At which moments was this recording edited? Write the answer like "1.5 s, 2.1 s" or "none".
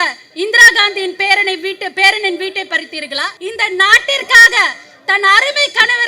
3.3 s